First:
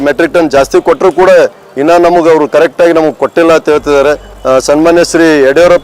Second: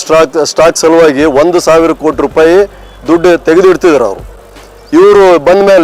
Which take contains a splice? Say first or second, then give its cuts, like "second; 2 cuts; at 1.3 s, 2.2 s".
first; 1 cut; at 4.3 s